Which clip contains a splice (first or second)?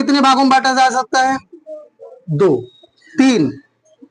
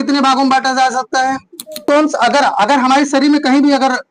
second